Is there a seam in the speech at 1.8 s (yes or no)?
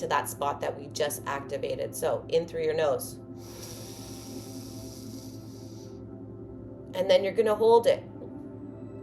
yes